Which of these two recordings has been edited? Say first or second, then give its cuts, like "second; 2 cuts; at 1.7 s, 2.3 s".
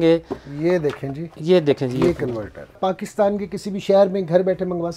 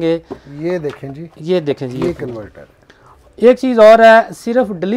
first; 1 cut; at 2.8 s